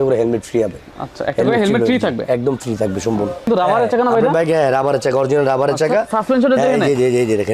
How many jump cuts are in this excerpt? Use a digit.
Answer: 1